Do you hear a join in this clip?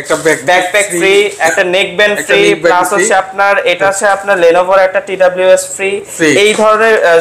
no; 0 cuts

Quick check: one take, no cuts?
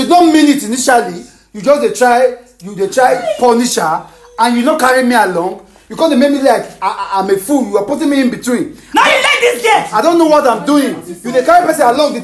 yes; 0 cuts

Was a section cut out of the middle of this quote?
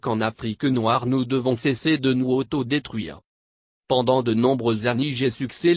yes; 1 cut; at 4.2 s

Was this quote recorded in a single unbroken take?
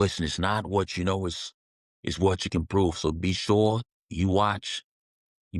yes; 0 cuts

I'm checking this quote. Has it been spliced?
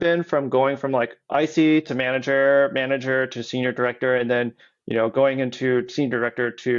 no; 0 cuts

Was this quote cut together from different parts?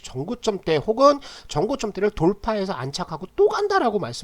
no; 0 cuts

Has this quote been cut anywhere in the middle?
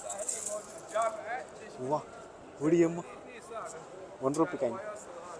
no; 0 cuts

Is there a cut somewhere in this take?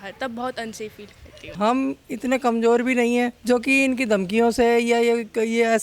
yes; 2 cuts; at 1.5 s, 3.4 s

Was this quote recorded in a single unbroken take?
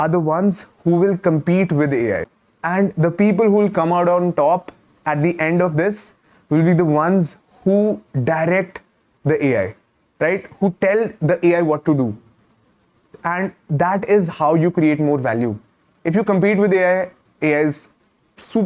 yes; 0 cuts

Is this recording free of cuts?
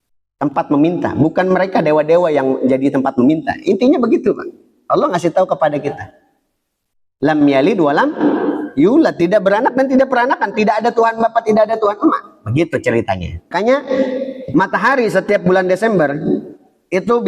no; 1 cut; at 13.5 s

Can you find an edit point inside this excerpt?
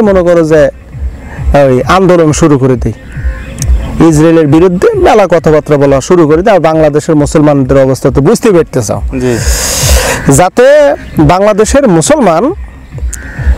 no; 0 cuts

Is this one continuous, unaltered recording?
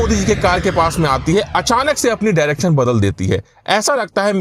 yes; 0 cuts

